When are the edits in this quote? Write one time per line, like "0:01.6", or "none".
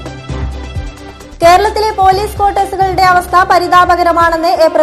0:00.9